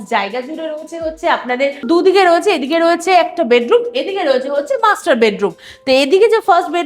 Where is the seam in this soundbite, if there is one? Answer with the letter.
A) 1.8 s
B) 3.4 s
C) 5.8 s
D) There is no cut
A